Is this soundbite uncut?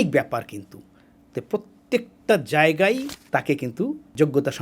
no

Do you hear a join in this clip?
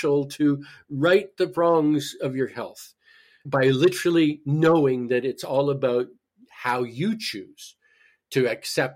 no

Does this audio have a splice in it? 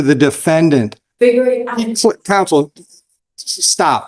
yes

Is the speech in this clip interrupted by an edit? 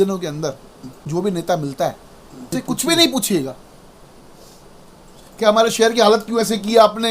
yes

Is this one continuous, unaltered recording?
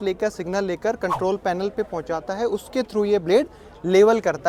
yes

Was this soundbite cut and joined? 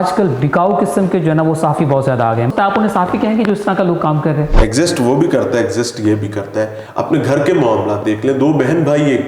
yes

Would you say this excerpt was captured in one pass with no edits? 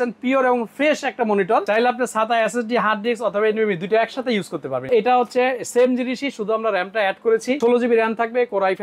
no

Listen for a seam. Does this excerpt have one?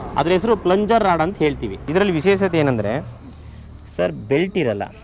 yes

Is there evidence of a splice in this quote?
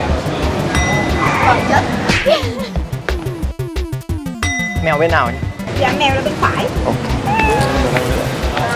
no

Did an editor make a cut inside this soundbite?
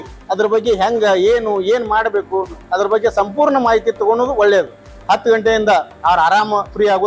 yes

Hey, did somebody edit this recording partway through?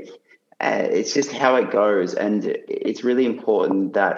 no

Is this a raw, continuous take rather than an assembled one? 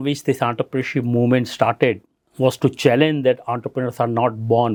yes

